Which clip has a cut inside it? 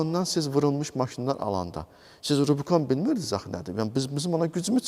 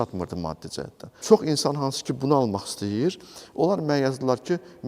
second; 1 cut; at 1.1 s

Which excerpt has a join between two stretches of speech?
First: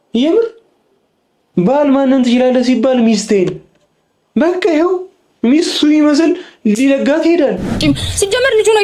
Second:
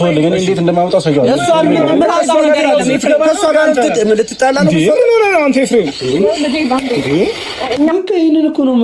first; 1 cut; at 7.7 s

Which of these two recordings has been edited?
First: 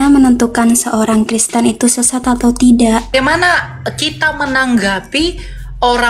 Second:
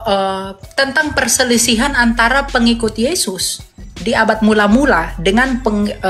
first; 1 cut; at 3.1 s

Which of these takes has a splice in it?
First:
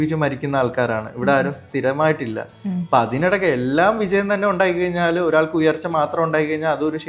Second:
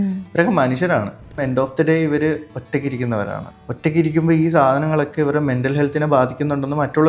second; 2 cuts; at 1.4 s, 3.5 s

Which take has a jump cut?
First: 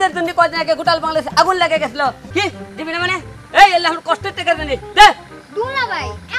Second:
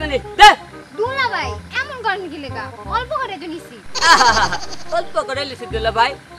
first; 1 cut; at 2.2 s

